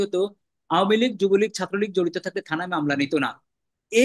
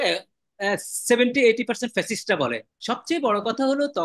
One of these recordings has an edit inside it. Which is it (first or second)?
second